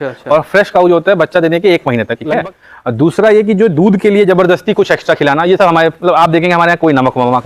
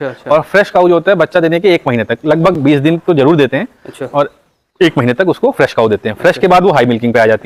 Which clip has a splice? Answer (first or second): first